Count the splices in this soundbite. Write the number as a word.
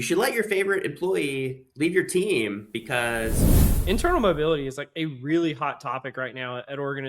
one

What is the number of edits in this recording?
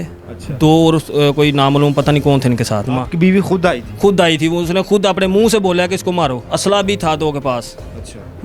two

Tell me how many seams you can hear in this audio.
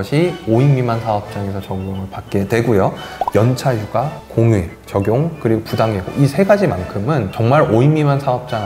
two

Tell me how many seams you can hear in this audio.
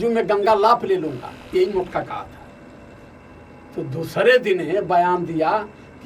one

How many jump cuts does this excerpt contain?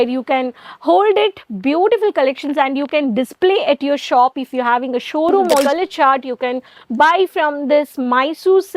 one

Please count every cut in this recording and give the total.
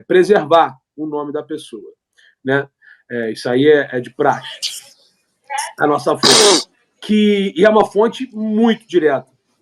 zero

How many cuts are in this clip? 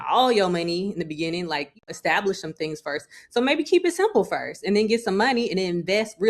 one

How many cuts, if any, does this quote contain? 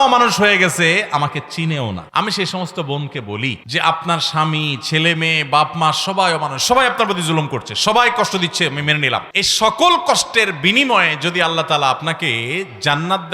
three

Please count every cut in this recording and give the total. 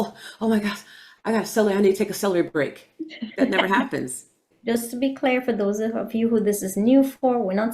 one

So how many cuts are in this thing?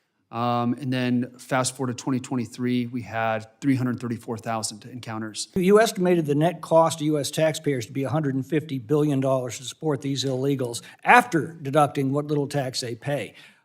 one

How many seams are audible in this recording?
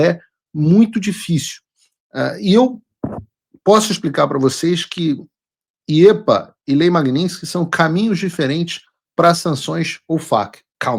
zero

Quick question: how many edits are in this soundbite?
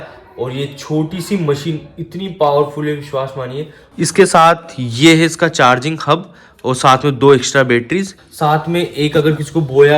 two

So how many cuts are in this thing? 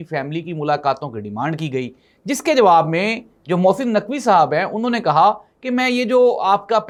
zero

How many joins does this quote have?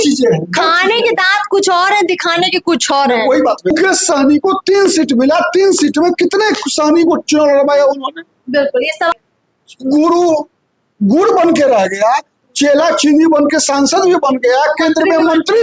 two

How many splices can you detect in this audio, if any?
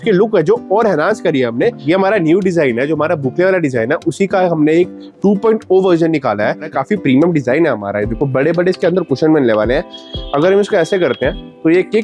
three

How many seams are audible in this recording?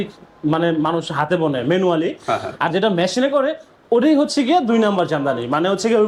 zero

